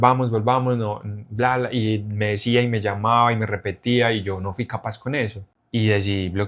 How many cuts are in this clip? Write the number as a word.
one